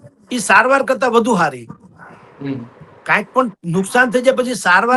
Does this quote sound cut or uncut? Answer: uncut